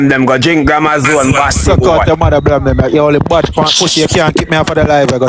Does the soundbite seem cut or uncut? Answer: uncut